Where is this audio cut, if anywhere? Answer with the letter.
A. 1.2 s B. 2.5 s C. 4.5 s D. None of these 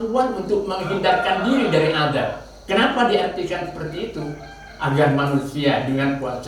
B